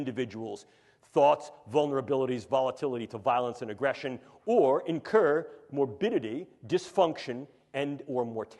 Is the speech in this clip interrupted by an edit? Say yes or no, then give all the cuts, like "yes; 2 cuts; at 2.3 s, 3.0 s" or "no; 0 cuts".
no; 0 cuts